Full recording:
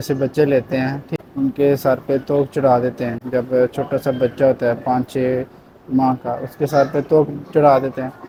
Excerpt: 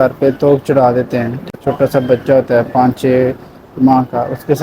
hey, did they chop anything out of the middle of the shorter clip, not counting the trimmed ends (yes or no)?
yes